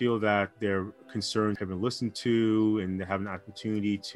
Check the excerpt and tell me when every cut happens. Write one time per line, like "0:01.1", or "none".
0:01.6